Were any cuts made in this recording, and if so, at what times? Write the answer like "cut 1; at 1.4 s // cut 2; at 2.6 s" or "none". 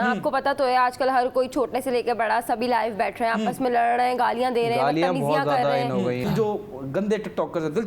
cut 1; at 6.2 s